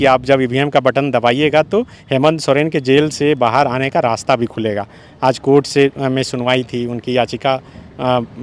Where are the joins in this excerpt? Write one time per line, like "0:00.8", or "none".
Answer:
none